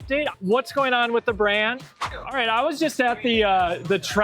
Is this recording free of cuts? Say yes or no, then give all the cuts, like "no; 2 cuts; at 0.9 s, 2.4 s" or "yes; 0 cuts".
no; 1 cut; at 1.8 s